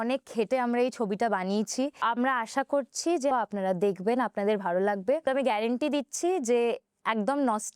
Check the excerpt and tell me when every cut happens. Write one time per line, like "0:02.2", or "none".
0:02.0
0:03.3
0:05.2